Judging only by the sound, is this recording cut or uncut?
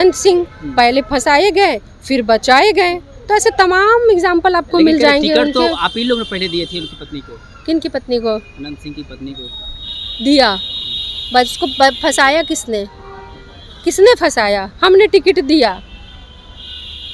uncut